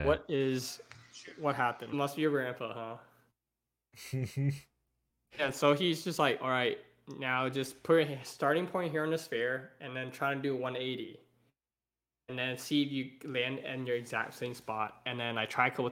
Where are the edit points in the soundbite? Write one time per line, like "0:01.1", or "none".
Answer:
0:01.9